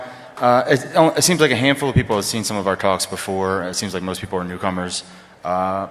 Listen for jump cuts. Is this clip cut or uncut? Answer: uncut